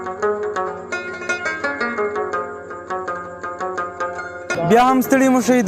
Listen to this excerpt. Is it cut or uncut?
uncut